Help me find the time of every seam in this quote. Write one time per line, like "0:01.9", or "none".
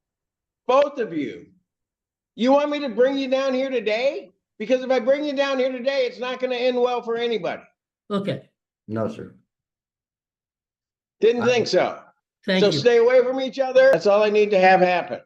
0:14.0